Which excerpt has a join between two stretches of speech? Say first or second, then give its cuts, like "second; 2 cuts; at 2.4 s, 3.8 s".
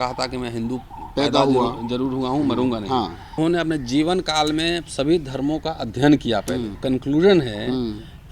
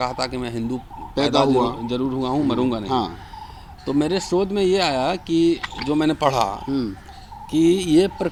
first; 2 cuts; at 3.4 s, 6.8 s